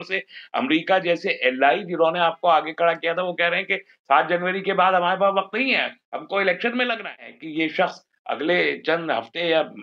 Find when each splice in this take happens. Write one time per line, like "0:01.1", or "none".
0:07.4